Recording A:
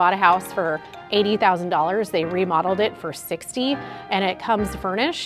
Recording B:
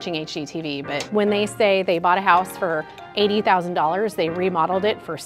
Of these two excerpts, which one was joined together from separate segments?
B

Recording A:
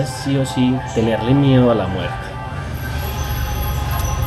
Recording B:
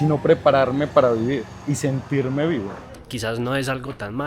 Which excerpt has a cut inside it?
B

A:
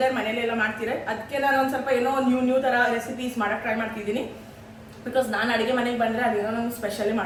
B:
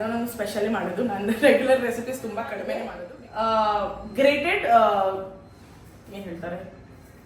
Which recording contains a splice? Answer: B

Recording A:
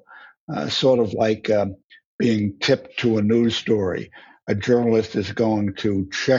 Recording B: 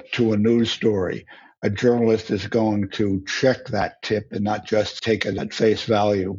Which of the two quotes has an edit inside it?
B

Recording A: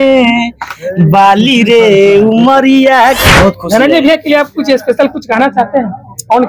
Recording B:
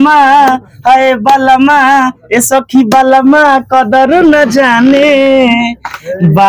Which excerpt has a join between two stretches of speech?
A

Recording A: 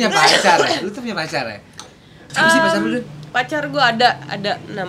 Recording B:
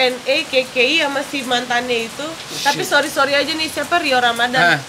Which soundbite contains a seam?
A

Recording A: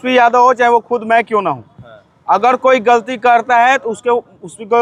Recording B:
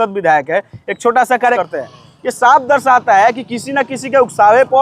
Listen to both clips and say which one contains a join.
B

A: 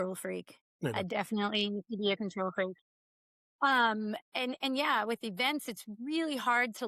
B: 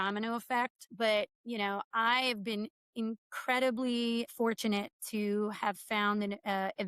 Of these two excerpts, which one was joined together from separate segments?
B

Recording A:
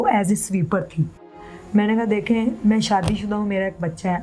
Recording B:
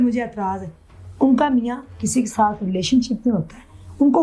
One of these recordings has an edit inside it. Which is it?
A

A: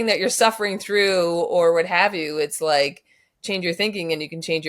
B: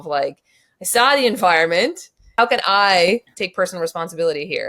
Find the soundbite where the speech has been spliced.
B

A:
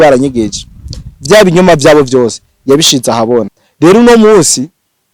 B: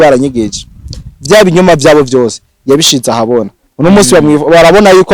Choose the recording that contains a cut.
A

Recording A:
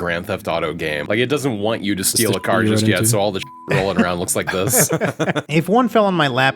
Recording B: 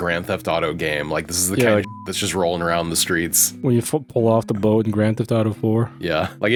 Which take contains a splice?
A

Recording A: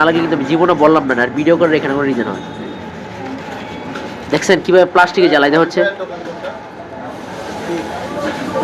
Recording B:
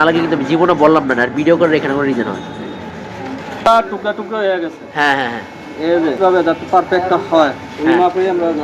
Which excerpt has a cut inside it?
B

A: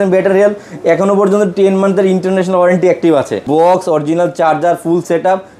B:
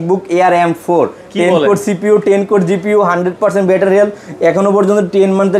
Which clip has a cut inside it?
A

